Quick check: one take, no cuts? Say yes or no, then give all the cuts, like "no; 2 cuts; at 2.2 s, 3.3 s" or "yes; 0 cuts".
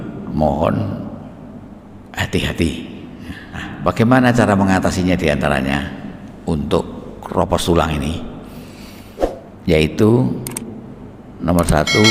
no; 1 cut; at 3.7 s